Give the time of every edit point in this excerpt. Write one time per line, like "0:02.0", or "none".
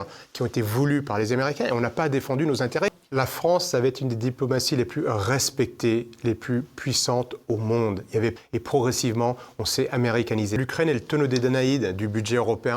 0:02.9
0:08.4
0:10.6